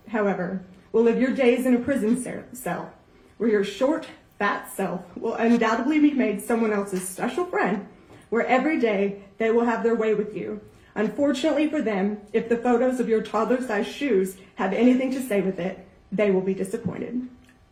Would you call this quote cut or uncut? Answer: uncut